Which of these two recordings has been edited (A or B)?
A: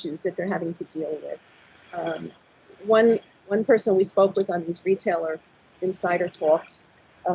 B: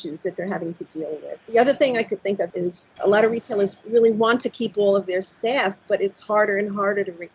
B